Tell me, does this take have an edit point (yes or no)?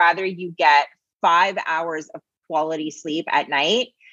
no